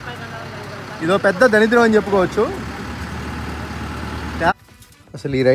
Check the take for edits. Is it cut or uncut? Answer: cut